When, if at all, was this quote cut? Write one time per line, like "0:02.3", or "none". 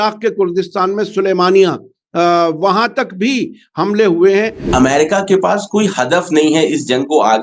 0:04.7